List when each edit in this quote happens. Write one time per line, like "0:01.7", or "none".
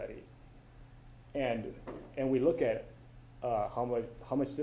0:02.5